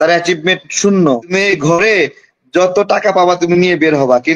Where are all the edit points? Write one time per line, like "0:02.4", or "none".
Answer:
0:01.3